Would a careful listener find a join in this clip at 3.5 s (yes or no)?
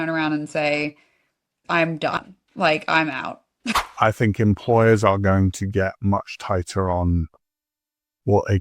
yes